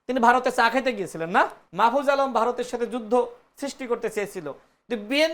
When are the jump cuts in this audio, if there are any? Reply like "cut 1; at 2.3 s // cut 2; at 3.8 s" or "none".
cut 1; at 1.6 s

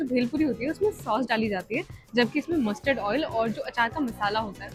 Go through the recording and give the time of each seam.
none

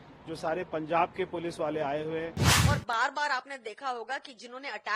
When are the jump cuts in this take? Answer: cut 1; at 2.5 s

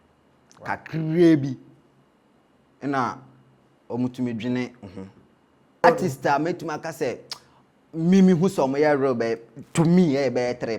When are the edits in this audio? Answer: cut 1; at 5.8 s

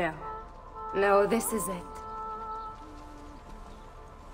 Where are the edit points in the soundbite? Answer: cut 1; at 1.7 s

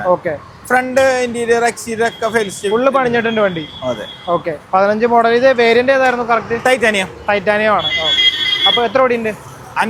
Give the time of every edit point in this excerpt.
none

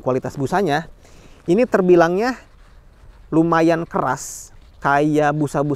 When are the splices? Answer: none

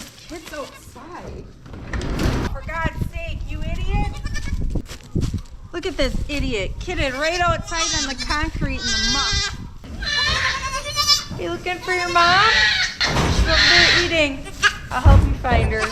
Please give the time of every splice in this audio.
cut 1; at 2.5 s // cut 2; at 4.9 s // cut 3; at 9.9 s // cut 4; at 12.9 s // cut 5; at 14.8 s

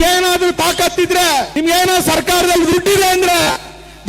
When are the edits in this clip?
cut 1; at 1.5 s

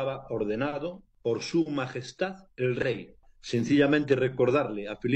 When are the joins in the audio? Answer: cut 1; at 1.0 s // cut 2; at 3.3 s

